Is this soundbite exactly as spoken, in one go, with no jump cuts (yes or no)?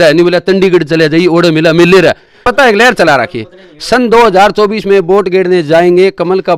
no